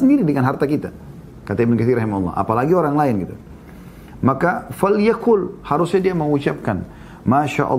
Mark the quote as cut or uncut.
uncut